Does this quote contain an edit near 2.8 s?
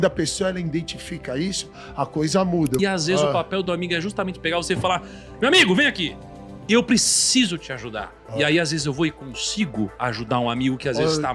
yes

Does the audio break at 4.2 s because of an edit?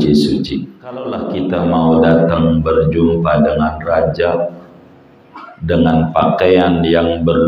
no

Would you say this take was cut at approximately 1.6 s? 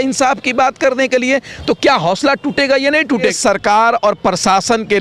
no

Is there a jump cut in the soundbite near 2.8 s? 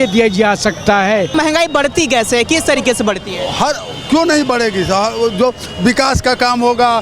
no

